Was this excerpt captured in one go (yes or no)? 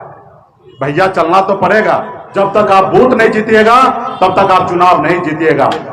no